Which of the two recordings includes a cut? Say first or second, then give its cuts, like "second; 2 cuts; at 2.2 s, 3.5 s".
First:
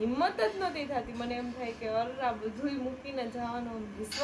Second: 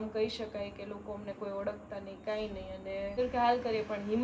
second; 1 cut; at 3.2 s